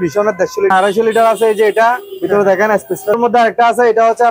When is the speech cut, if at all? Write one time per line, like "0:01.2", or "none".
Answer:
0:00.7
0:03.1